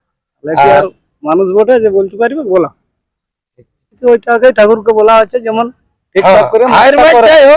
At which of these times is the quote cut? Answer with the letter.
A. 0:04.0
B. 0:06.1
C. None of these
A